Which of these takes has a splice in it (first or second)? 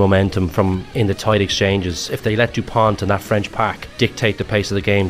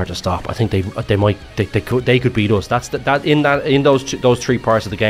first